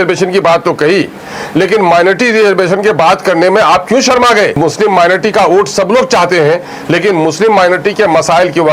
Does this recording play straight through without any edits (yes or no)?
no